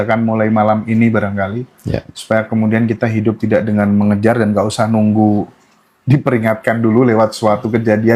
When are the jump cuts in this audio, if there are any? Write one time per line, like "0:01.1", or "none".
none